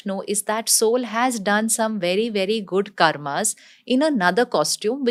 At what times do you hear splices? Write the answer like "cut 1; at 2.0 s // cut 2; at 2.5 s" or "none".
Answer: none

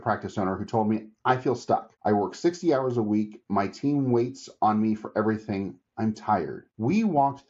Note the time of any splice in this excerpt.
cut 1; at 1.9 s // cut 2; at 6.6 s

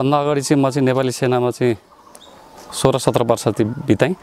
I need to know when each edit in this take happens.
none

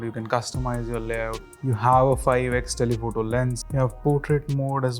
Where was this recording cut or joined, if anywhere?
cut 1; at 1.4 s // cut 2; at 3.6 s

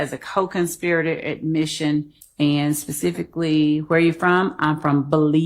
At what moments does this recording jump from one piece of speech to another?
cut 1; at 2.2 s

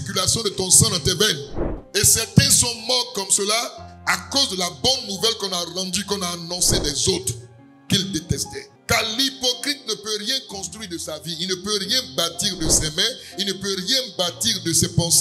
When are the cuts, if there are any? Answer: cut 1; at 1.8 s

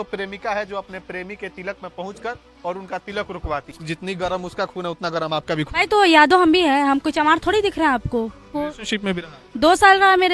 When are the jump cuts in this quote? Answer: cut 1; at 3.7 s // cut 2; at 8.5 s

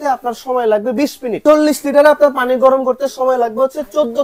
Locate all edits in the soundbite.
cut 1; at 1.4 s

